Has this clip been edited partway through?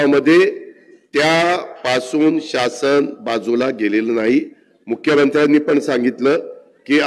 no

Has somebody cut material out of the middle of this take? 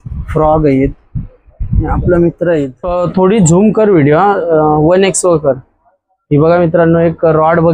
yes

